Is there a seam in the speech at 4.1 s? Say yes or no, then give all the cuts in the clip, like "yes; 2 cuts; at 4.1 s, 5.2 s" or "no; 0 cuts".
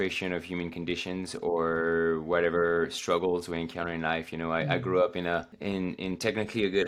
no; 1 cut; at 5.5 s